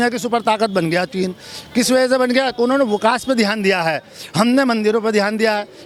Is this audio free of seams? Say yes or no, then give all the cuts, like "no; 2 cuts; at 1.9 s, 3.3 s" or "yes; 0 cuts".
yes; 0 cuts